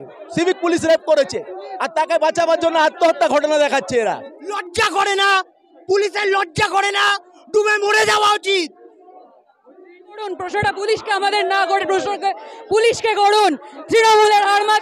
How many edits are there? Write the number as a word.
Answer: two